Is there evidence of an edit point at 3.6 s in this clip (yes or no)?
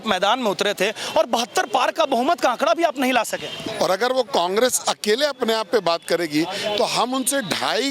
yes